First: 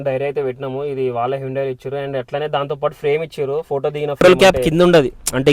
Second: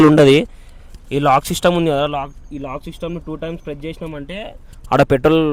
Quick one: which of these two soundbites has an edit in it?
first; 1 cut; at 4.2 s

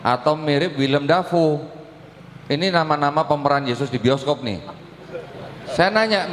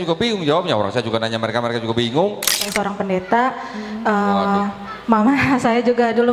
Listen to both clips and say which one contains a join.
second; 1 cut; at 2.7 s

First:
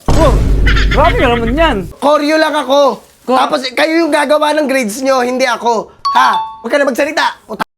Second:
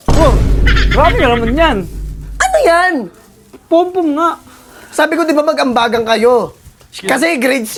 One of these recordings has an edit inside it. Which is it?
first; 2 cuts; at 1.9 s, 6.7 s

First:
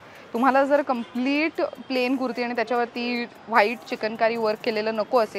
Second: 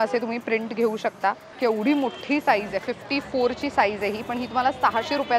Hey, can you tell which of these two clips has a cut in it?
second; 1 cut; at 1.5 s

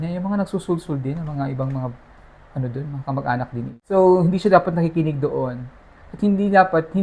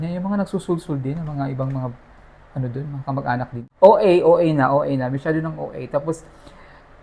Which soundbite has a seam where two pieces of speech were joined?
second; 1 cut; at 3.6 s

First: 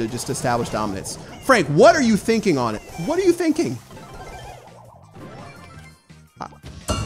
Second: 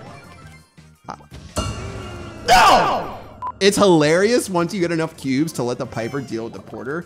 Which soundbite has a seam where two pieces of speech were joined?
second; 1 cut; at 3.5 s

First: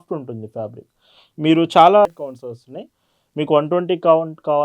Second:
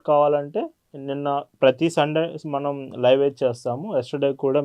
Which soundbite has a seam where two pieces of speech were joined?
first; 1 cut; at 2.1 s

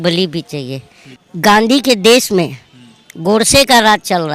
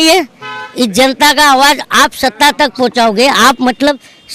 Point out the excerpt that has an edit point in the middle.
first; 1 cut; at 1.2 s

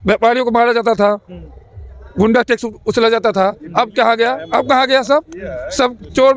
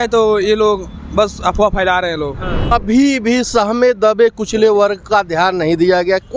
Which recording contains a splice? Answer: second; 1 cut; at 2.7 s

